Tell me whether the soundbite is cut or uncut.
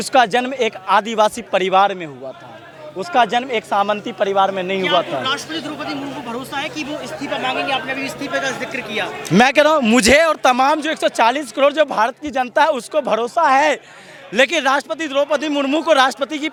uncut